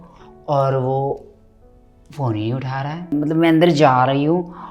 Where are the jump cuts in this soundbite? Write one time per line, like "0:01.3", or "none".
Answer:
0:03.1